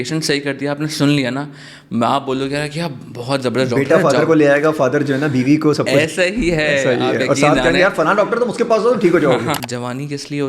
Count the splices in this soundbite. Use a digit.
1